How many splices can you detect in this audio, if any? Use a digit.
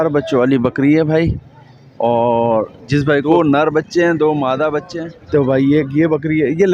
2